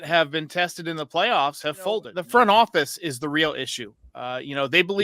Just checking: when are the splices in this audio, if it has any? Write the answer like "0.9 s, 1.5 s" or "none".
2.1 s